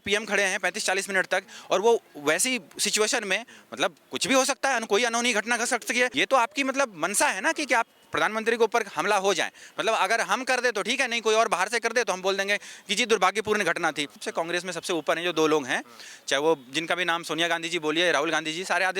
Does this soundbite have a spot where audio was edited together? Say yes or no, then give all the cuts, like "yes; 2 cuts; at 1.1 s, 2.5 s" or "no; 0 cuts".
yes; 2 cuts; at 6.1 s, 14.2 s